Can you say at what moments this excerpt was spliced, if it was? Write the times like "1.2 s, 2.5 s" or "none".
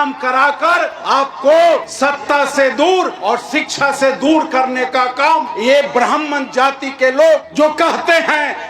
1.0 s, 1.9 s, 3.1 s, 5.5 s, 7.5 s